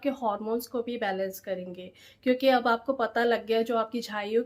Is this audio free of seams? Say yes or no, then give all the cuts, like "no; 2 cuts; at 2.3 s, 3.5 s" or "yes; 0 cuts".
yes; 0 cuts